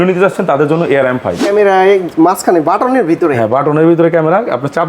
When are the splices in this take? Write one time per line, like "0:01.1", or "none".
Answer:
0:01.4